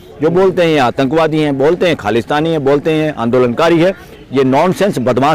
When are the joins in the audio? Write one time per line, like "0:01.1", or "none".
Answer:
none